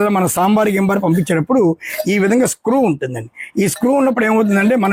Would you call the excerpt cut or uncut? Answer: uncut